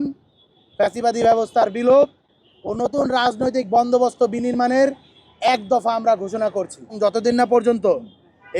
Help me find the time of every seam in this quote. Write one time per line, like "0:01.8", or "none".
0:06.9